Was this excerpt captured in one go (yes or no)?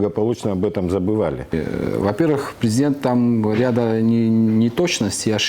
no